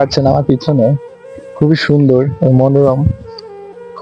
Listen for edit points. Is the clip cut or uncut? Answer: uncut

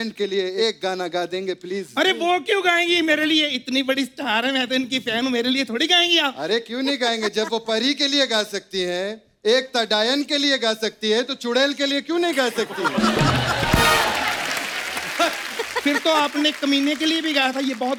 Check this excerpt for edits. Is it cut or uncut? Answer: uncut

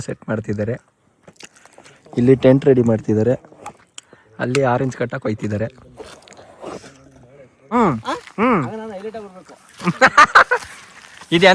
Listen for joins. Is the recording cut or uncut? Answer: cut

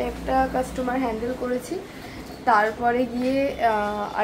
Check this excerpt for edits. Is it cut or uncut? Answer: uncut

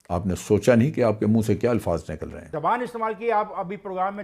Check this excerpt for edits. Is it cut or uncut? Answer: cut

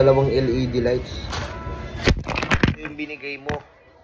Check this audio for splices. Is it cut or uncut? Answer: uncut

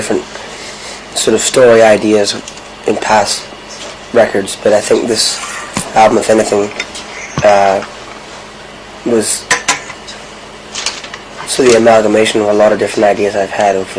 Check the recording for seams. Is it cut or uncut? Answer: cut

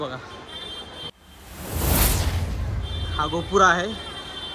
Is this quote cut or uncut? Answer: uncut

